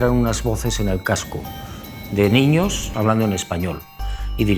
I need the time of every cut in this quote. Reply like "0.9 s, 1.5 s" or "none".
2.9 s